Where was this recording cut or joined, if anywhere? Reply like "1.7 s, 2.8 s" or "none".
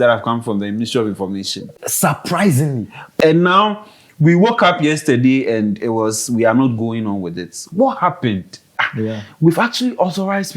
3.1 s, 8.8 s